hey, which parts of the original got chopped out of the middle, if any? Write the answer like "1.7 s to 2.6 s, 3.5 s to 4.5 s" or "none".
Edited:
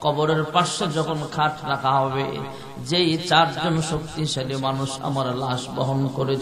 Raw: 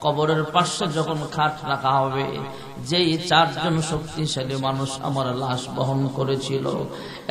none